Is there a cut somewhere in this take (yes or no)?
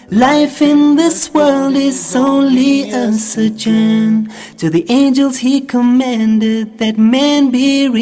no